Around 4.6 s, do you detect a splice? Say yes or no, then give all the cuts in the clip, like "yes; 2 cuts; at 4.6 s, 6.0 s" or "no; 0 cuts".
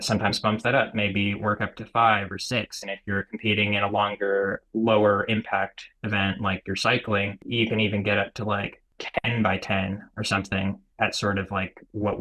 yes; 4 cuts; at 4.6 s, 7.4 s, 9.0 s, 10.9 s